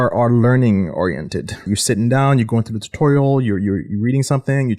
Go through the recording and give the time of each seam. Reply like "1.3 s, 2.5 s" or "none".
1.7 s